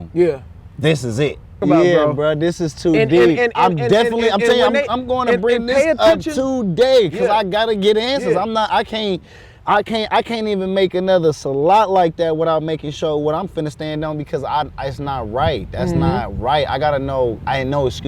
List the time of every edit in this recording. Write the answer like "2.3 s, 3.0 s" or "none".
1.6 s

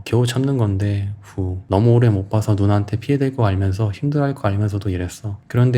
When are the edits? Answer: 1.6 s

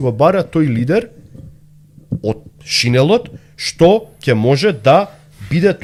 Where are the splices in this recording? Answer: none

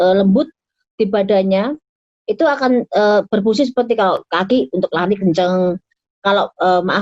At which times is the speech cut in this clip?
none

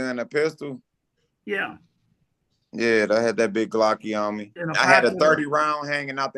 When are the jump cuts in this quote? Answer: 4.6 s

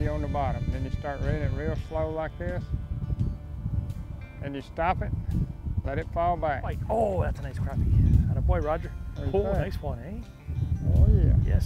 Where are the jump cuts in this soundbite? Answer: 6.8 s

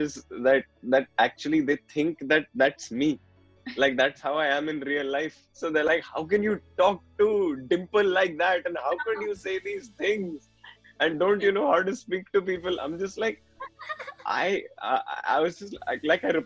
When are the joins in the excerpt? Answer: 5.4 s

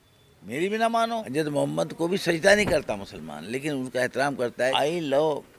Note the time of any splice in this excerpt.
1.3 s, 4.7 s

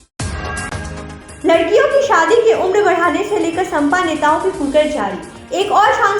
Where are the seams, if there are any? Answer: none

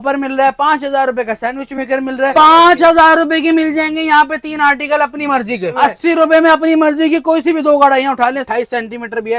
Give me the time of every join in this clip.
2.3 s, 5.8 s, 8.4 s

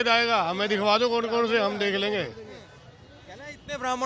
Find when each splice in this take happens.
none

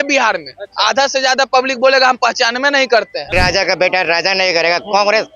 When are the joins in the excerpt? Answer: 3.3 s

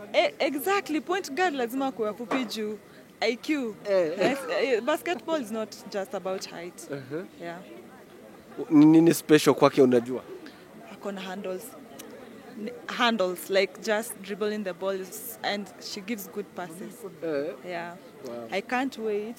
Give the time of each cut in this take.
none

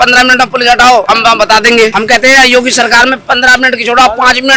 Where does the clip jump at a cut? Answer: 1.1 s, 1.9 s

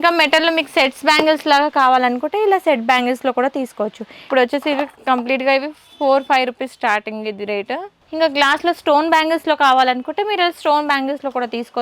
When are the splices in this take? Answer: 4.3 s, 8.0 s

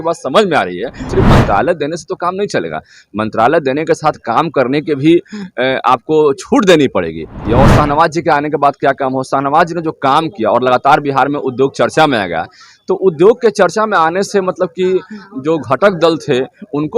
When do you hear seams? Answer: 1.0 s, 7.4 s

